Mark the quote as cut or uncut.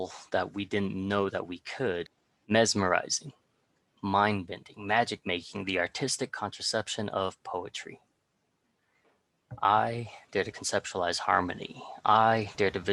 cut